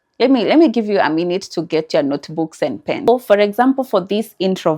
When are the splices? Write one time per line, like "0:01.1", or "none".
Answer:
0:03.1